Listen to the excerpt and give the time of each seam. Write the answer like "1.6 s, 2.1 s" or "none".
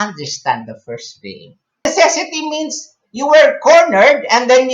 1.9 s